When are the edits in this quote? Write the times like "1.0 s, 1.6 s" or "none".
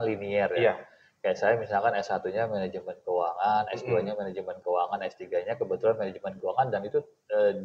none